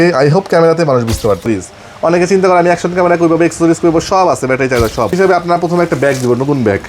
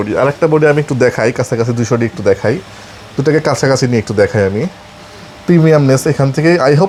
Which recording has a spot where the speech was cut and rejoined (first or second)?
first